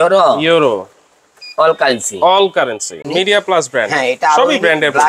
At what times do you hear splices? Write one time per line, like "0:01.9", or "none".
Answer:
0:03.0